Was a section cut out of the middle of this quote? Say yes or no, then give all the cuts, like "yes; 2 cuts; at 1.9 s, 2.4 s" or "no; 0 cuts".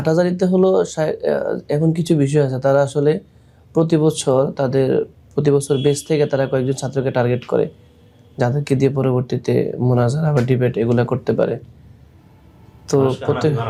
no; 0 cuts